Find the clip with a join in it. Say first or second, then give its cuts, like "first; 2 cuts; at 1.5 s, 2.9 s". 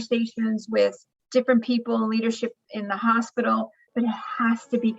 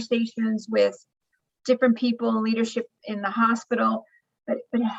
first; 2 cuts; at 1.1 s, 3.9 s